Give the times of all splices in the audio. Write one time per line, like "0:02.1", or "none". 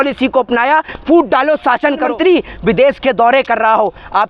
0:02.1